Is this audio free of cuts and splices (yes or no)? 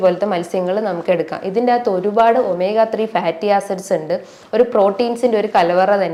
yes